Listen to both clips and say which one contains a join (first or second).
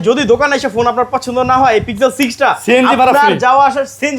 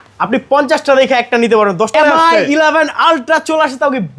second